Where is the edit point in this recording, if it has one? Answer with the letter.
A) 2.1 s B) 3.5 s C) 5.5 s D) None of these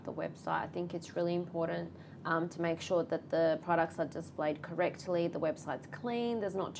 D